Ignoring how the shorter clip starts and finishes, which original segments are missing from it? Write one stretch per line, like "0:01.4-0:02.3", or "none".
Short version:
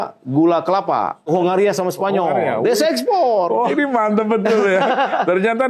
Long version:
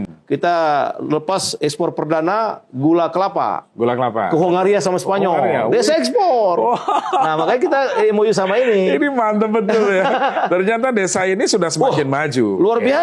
0:03.7-0:04.3
0:06.8-0:08.9